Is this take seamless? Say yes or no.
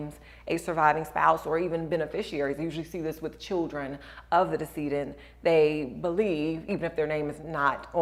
yes